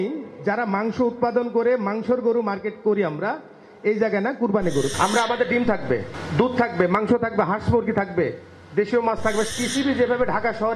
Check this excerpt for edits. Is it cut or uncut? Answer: cut